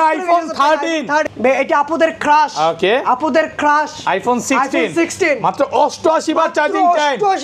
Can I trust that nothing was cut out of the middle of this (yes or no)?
no